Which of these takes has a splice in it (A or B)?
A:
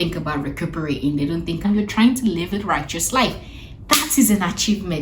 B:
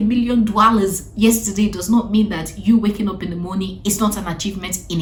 A